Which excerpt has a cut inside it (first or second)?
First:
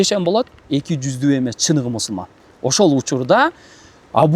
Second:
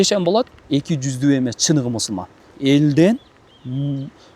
second